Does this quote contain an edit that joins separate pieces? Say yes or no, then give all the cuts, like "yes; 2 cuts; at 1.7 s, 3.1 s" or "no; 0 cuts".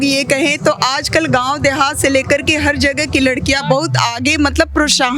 no; 0 cuts